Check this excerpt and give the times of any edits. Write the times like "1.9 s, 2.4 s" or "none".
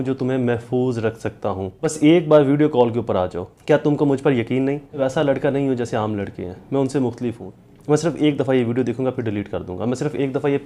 1.9 s, 3.5 s, 5.0 s, 7.5 s